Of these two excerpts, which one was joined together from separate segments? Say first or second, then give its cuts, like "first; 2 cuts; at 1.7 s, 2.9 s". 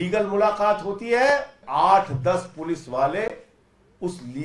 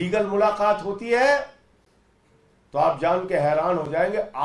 first; 1 cut; at 1.6 s